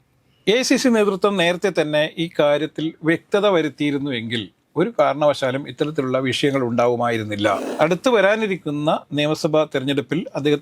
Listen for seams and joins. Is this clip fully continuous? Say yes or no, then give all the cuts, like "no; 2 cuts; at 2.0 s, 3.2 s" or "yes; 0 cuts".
no; 1 cut; at 7.7 s